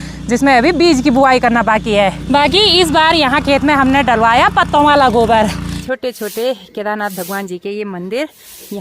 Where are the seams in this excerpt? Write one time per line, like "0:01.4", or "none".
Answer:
0:02.2
0:05.7